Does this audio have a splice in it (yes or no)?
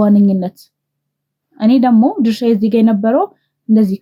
no